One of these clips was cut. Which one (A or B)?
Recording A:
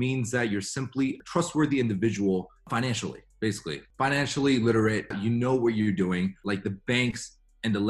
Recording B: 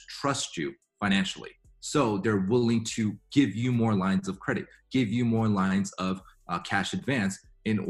A